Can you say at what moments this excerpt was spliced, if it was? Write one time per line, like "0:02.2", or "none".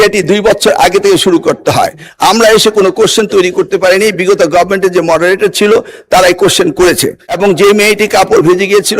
0:07.3